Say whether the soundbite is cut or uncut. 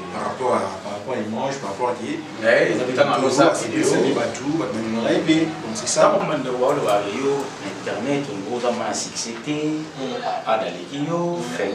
cut